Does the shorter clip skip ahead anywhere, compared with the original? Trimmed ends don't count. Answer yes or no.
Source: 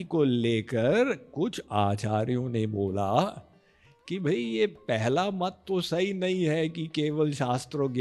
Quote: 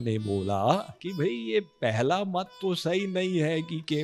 yes